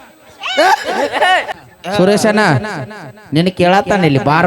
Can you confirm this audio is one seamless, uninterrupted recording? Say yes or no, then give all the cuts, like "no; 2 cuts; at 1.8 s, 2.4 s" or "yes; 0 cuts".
no; 1 cut; at 1.6 s